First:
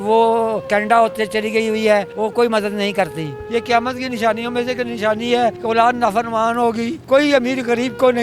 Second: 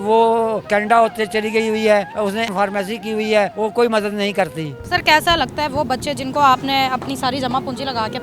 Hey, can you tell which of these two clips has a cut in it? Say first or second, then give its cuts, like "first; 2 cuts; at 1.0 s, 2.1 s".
first; 3 cuts; at 2.1 s, 3.4 s, 7.0 s